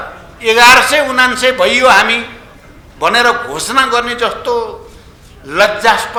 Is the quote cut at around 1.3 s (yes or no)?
no